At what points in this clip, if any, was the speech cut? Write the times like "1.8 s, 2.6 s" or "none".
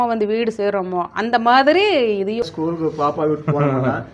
2.5 s